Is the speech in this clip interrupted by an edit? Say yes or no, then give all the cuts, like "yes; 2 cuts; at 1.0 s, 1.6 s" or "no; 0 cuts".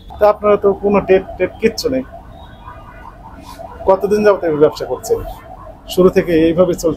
no; 0 cuts